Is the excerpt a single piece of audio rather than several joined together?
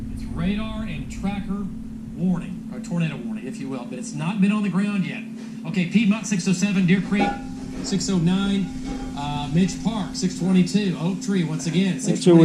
yes; 0 cuts

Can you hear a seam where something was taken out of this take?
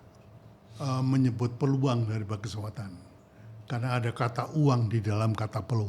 no; 0 cuts

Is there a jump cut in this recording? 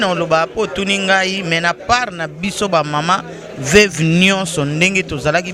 no; 0 cuts

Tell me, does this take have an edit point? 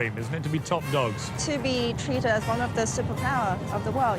yes; 1 cut; at 1.3 s

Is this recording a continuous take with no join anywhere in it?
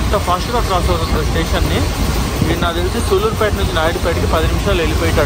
yes; 0 cuts

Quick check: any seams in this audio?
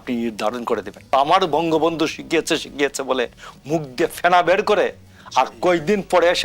yes; 1 cut; at 1.1 s

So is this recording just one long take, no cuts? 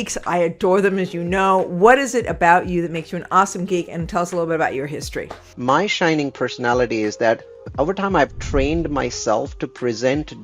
no; 2 cuts; at 5.5 s, 7.7 s

